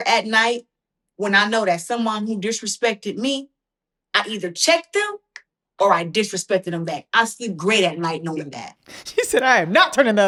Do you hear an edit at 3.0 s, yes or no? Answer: no